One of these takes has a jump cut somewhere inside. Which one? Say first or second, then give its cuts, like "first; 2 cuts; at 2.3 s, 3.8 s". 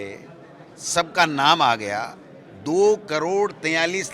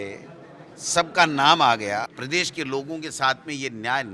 second; 1 cut; at 2.2 s